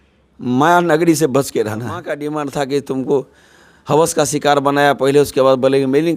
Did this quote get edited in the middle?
yes; 1 cut; at 2.2 s

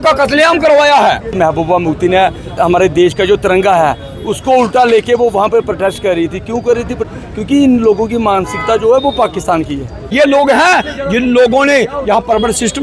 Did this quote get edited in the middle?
yes; 4 cuts; at 1.3 s, 2.5 s, 7.1 s, 10.0 s

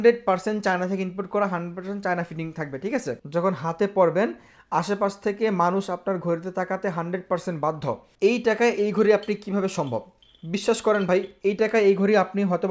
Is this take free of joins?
no; 2 cuts; at 3.2 s, 8.1 s

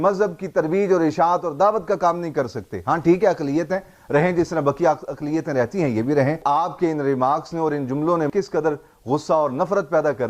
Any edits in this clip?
yes; 2 cuts; at 6.4 s, 8.3 s

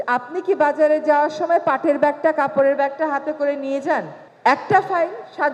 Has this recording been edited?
yes; 1 cut; at 4.2 s

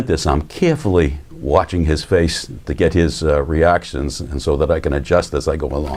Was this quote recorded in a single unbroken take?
yes; 0 cuts

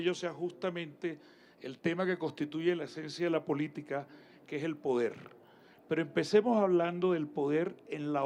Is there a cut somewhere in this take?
no; 0 cuts

